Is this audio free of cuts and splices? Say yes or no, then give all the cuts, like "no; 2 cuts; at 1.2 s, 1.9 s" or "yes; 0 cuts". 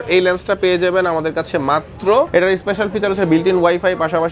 no; 1 cut; at 2.3 s